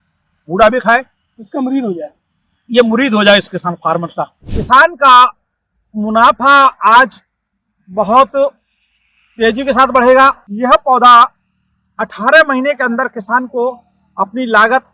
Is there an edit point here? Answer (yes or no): yes